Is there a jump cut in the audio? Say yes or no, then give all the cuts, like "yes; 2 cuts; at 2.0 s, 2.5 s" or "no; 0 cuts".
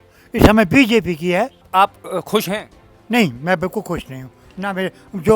yes; 1 cut; at 1.7 s